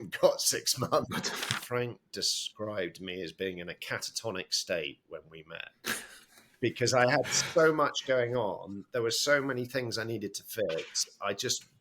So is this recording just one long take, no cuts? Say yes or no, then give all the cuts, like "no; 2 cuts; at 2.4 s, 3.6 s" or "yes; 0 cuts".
no; 1 cut; at 1.6 s